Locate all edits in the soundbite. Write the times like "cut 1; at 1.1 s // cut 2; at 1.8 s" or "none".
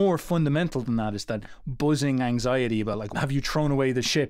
cut 1; at 3.0 s

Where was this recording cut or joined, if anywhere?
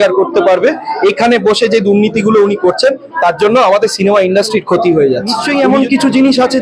cut 1; at 5.4 s

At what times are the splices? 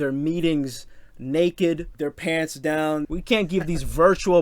cut 1; at 1.9 s // cut 2; at 3.1 s

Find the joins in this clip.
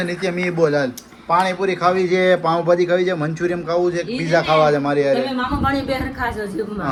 none

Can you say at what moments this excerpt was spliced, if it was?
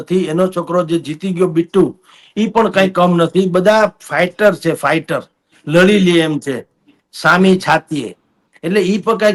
none

